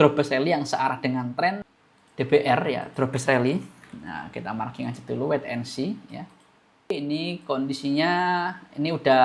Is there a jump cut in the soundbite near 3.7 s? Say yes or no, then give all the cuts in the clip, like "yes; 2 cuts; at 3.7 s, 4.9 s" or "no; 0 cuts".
no; 2 cuts; at 1.6 s, 7.0 s